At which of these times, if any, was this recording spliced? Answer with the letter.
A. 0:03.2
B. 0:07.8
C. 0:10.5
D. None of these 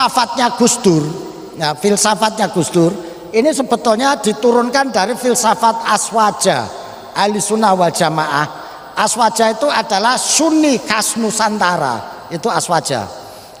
D